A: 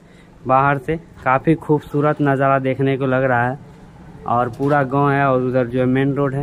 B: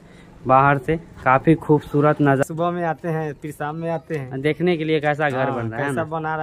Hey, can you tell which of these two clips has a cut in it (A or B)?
B